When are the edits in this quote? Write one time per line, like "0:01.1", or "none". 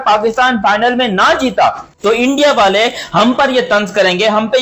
0:01.9